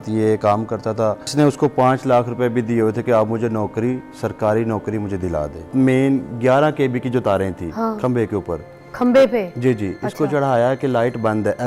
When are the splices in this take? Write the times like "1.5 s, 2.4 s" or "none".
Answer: 1.3 s, 5.7 s